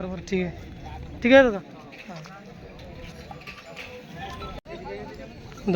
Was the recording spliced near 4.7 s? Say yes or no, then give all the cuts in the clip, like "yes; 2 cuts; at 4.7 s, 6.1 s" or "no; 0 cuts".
yes; 1 cut; at 4.7 s